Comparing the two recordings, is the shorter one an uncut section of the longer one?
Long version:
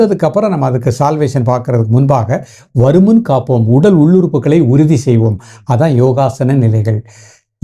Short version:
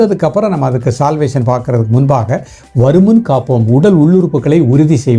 yes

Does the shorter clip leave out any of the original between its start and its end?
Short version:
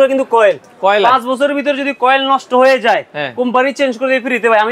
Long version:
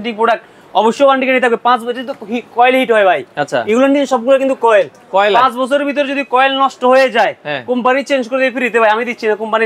no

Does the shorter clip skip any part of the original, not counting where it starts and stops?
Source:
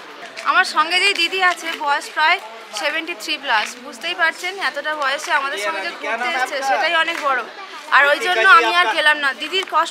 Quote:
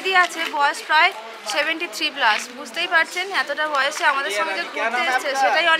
no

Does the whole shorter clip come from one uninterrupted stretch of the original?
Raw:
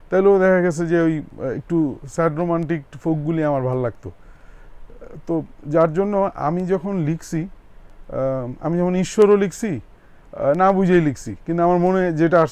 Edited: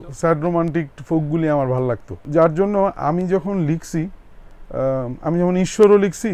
no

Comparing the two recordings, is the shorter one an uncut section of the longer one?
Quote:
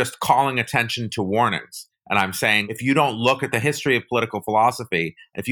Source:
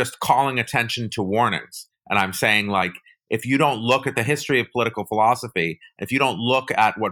no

